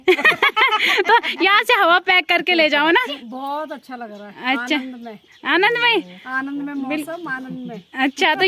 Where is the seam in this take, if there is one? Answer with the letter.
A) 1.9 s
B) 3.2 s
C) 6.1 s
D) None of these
B